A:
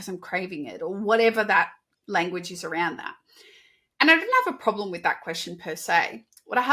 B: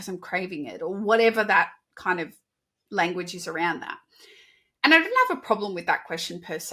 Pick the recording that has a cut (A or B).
A